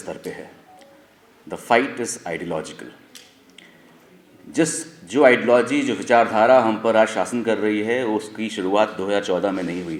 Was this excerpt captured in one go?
yes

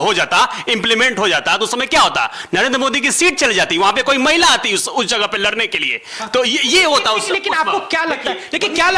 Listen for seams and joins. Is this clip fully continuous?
yes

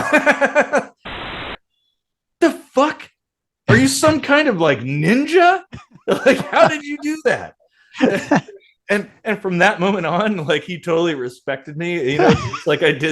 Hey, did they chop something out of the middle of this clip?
yes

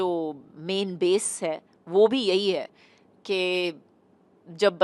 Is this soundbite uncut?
yes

